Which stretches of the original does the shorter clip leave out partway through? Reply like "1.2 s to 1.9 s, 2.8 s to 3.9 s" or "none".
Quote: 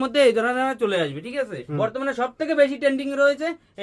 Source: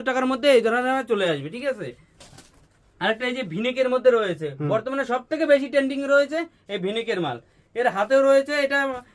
1.9 s to 4.5 s